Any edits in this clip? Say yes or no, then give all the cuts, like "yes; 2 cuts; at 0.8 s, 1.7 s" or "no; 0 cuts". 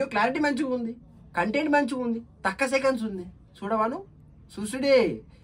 no; 0 cuts